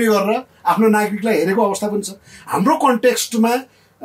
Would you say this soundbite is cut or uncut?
uncut